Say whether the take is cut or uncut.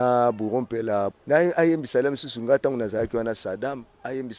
cut